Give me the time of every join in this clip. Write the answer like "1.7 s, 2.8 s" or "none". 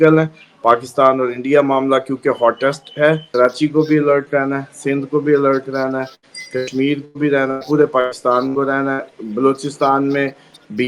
3.2 s